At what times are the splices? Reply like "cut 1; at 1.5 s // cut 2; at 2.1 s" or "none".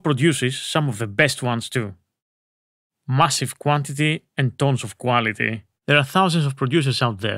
cut 1; at 5.7 s